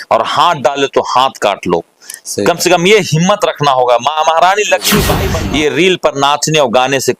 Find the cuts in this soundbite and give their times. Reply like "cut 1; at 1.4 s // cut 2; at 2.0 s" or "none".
cut 1; at 5.3 s